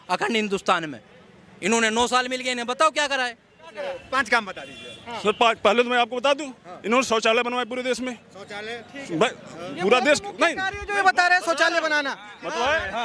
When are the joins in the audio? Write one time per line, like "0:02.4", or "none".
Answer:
0:03.8